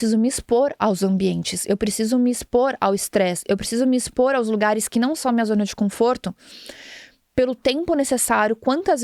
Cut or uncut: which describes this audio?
cut